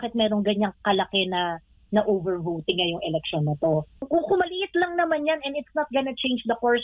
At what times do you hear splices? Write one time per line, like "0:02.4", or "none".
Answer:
0:04.1